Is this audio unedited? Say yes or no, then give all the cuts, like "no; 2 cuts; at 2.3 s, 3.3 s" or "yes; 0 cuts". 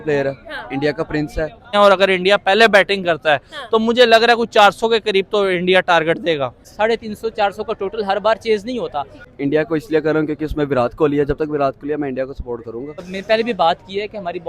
no; 4 cuts; at 1.7 s, 6.7 s, 9.2 s, 13.1 s